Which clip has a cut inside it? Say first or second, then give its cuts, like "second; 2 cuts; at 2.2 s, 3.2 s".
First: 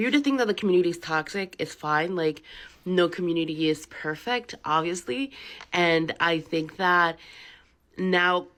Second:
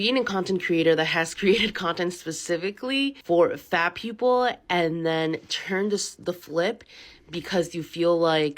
second; 1 cut; at 3.2 s